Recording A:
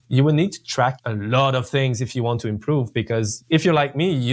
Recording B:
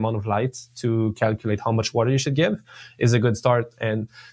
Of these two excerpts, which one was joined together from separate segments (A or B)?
A